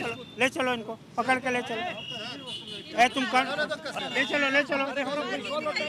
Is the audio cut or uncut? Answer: cut